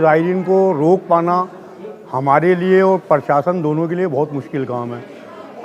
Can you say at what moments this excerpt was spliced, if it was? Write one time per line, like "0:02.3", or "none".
none